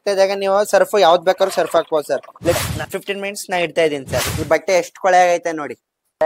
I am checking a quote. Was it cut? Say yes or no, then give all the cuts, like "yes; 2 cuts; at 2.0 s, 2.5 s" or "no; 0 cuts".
yes; 2 cuts; at 2.6 s, 4.4 s